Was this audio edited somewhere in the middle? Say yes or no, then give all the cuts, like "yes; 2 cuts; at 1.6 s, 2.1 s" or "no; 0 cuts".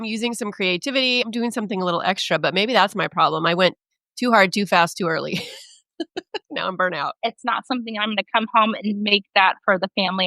yes; 2 cuts; at 1.2 s, 7.2 s